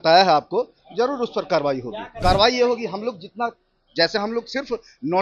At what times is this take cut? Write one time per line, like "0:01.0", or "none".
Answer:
0:02.0